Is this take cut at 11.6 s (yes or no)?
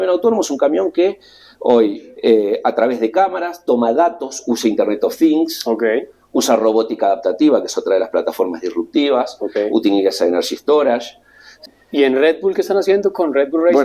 yes